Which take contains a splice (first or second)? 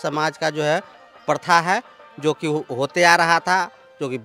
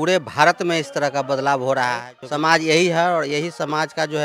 second